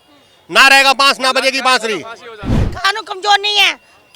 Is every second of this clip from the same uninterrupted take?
no; 1 cut; at 2.5 s

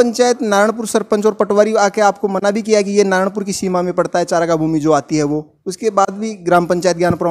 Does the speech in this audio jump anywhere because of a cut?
no; 0 cuts

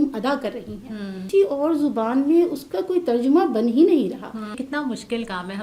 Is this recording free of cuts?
no; 2 cuts; at 1.2 s, 4.6 s

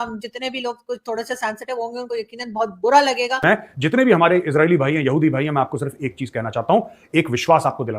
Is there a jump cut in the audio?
yes; 1 cut; at 3.4 s

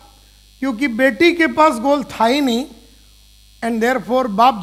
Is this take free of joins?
yes; 0 cuts

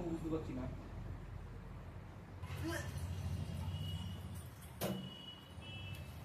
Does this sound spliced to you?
yes; 1 cut; at 2.4 s

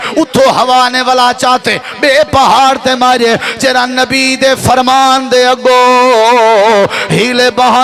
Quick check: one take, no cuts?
yes; 0 cuts

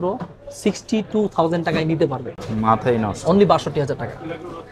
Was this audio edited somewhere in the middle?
no; 0 cuts

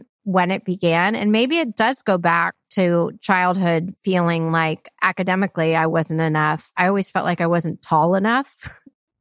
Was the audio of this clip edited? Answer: yes; 2 cuts; at 4.9 s, 6.7 s

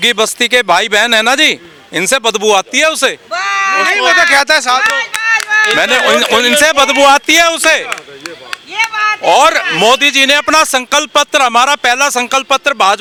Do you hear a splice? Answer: no; 0 cuts

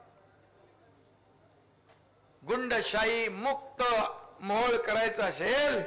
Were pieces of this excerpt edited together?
no; 0 cuts

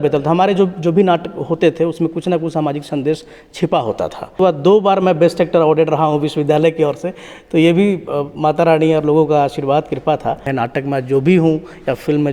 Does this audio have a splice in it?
yes; 2 cuts; at 4.4 s, 10.5 s

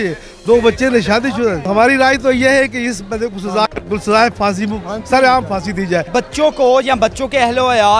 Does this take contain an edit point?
yes; 2 cuts; at 1.6 s, 6.1 s

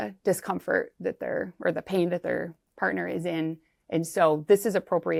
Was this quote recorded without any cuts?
yes; 0 cuts

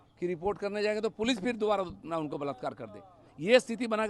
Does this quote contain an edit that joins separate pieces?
no; 0 cuts

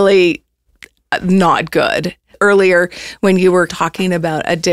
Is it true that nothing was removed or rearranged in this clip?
no; 2 cuts; at 2.3 s, 3.7 s

